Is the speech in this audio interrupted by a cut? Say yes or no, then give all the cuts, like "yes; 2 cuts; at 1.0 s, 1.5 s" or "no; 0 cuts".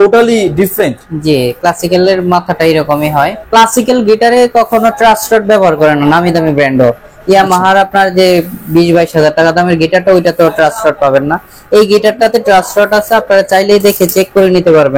yes; 1 cut; at 3.4 s